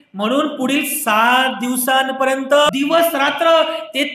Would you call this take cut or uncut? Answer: cut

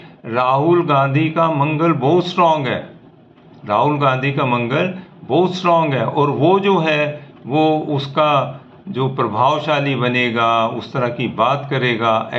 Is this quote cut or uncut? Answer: uncut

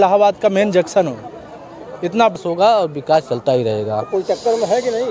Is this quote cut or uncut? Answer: cut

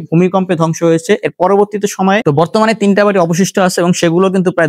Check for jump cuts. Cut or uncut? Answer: cut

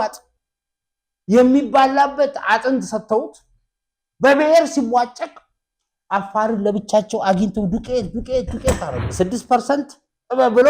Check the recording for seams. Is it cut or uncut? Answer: cut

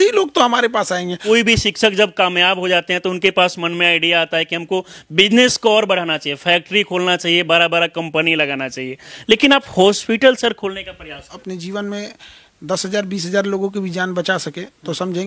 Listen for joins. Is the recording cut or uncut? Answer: cut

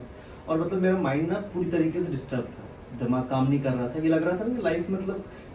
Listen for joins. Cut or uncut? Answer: uncut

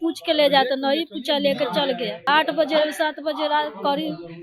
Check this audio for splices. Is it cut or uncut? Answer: cut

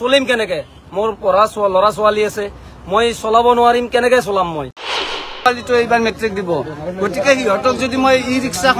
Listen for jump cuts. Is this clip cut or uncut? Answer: cut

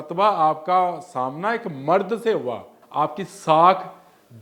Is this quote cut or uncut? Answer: cut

